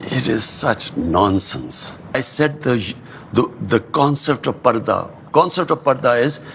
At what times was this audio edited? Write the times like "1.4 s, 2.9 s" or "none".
2.1 s